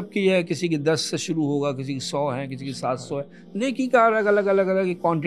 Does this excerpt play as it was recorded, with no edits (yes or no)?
yes